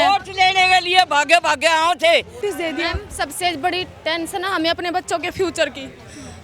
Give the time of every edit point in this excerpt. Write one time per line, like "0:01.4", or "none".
0:02.3